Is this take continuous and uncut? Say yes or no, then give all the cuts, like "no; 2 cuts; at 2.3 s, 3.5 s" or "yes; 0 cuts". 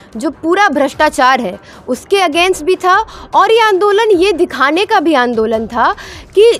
yes; 0 cuts